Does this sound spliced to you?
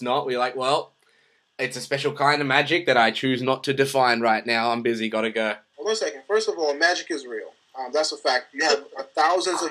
yes; 1 cut; at 5.7 s

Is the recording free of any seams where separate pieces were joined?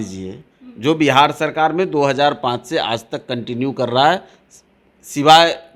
yes; 0 cuts

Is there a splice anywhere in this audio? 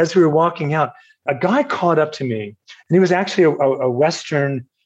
yes; 1 cut; at 1.2 s

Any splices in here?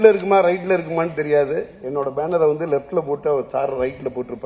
no; 0 cuts

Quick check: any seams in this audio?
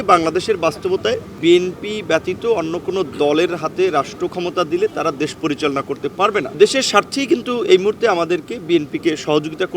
yes; 2 cuts; at 1.3 s, 6.5 s

